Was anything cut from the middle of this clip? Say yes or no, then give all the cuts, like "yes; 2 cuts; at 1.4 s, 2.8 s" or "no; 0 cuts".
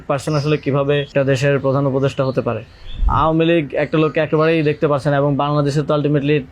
yes; 2 cuts; at 1.1 s, 3.0 s